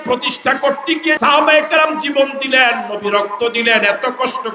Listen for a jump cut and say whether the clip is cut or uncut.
cut